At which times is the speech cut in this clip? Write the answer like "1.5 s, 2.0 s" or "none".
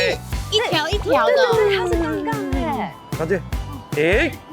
3.0 s